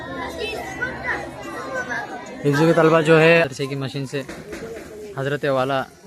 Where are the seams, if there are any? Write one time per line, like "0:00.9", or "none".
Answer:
0:03.5